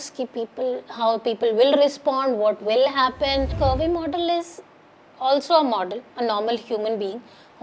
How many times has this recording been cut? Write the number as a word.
one